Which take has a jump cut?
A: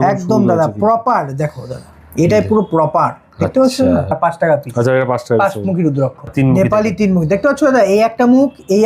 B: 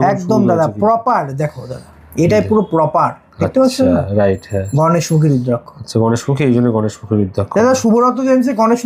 A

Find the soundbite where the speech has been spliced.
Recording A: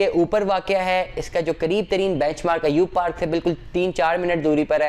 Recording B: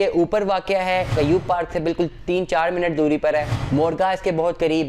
B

